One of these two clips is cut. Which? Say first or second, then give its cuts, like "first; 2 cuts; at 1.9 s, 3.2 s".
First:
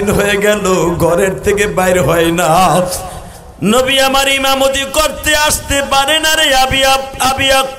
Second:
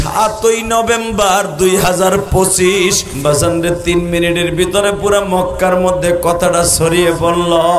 second; 1 cut; at 3.1 s